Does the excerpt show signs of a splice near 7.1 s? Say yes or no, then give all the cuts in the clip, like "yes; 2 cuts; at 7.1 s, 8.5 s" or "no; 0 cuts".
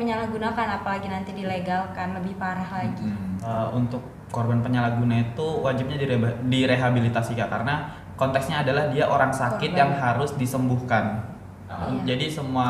no; 2 cuts; at 3.5 s, 11.8 s